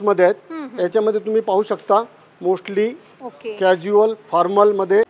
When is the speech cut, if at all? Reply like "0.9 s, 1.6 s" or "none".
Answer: none